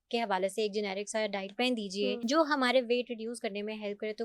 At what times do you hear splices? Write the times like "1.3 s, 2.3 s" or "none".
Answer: 2.2 s